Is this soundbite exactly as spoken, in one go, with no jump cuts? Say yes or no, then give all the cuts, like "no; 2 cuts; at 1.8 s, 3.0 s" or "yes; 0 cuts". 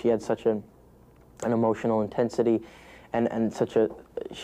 yes; 0 cuts